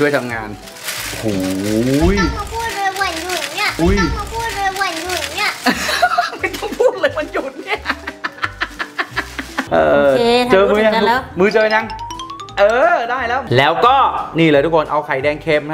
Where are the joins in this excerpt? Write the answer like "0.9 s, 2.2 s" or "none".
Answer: 9.7 s